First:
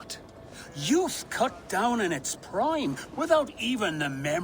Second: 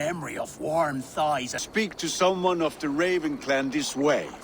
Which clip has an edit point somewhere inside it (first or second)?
second